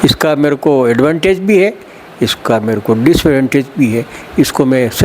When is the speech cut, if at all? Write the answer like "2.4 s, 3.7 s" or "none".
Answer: none